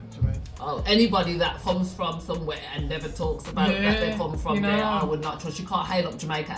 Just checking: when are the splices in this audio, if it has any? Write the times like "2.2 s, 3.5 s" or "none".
1.6 s